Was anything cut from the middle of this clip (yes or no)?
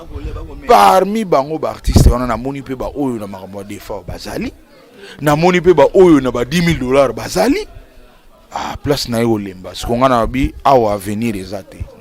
no